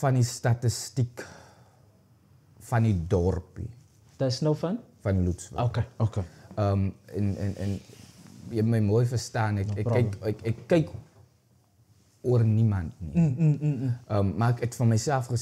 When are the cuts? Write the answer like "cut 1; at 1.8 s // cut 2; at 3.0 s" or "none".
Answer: none

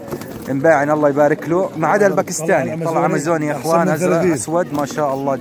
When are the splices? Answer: none

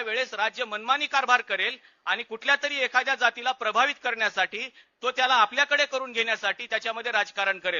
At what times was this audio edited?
none

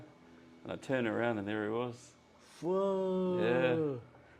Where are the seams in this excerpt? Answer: none

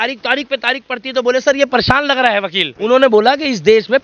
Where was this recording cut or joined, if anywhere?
cut 1; at 2.7 s

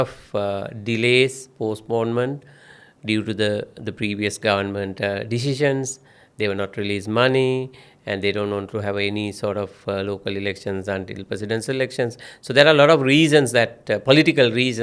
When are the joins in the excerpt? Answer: none

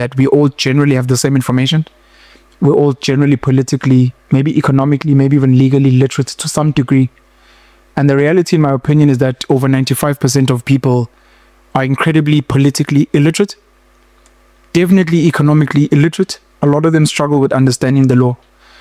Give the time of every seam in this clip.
none

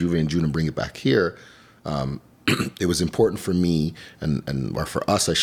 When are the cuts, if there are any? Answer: none

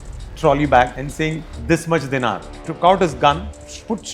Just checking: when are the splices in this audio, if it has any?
cut 1; at 1.0 s // cut 2; at 2.5 s

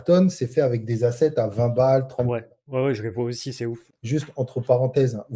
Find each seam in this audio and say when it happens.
cut 1; at 3.9 s

